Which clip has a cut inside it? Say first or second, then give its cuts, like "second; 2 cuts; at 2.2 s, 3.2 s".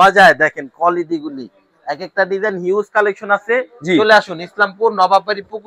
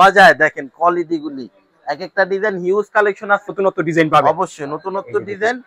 second; 1 cut; at 3.5 s